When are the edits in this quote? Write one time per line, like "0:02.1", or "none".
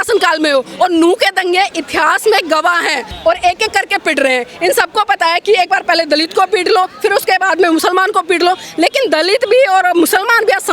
0:03.1